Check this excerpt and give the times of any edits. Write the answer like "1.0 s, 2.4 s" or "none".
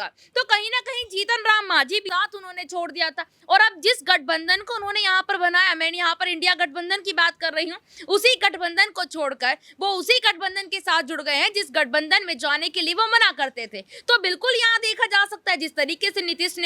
2.1 s

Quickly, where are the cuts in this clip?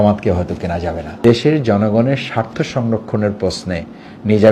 1.1 s

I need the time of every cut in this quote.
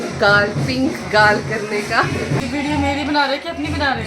2.4 s

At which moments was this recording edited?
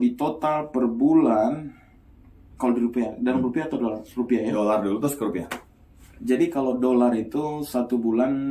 none

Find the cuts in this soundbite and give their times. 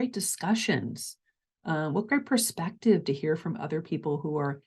none

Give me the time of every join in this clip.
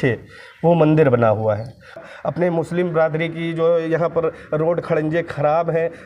2.0 s

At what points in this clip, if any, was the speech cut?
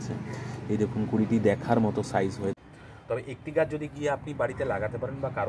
2.7 s

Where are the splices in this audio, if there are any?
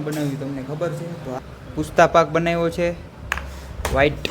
1.4 s

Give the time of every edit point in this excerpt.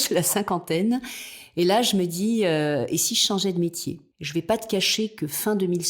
4.1 s

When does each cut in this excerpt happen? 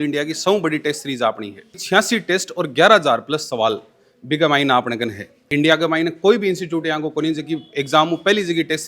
1.8 s

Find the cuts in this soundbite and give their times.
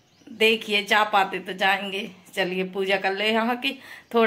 none

